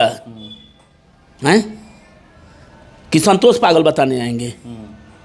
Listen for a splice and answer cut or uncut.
uncut